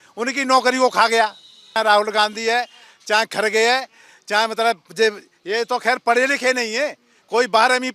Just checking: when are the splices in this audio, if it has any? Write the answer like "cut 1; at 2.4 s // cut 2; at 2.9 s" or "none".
cut 1; at 1.6 s